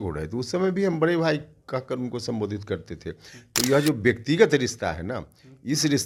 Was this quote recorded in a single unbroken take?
yes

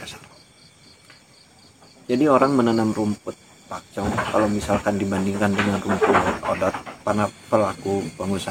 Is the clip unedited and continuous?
no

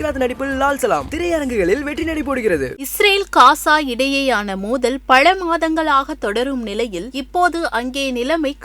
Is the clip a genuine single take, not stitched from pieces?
no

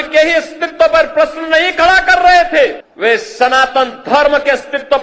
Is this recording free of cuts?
no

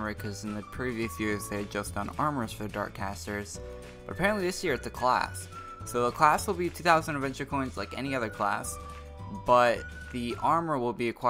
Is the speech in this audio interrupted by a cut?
yes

